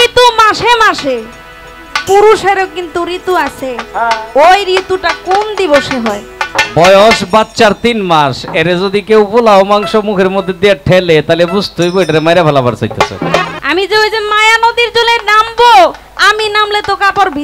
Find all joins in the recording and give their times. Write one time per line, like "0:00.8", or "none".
0:06.5
0:13.5